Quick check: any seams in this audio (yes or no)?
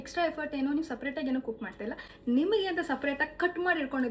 no